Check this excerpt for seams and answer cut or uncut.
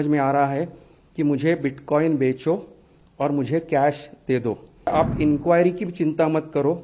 cut